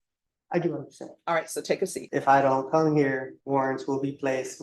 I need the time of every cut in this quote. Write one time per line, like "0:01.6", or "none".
0:02.0
0:03.3